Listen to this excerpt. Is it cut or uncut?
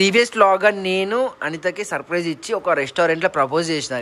uncut